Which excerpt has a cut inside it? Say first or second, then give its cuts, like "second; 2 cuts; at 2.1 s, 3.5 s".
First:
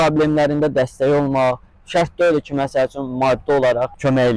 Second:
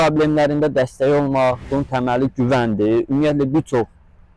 second; 1 cut; at 1.7 s